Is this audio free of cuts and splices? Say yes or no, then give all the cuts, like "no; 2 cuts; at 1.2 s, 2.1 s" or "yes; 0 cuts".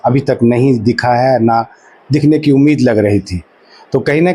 yes; 0 cuts